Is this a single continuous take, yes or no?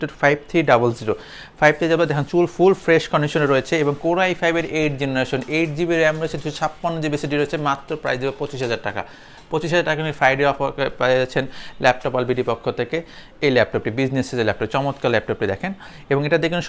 yes